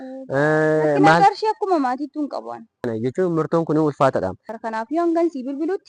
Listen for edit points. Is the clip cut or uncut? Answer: cut